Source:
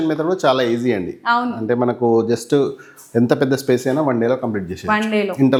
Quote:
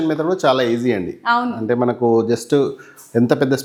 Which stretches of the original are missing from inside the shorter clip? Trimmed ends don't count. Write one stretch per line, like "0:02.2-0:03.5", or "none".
none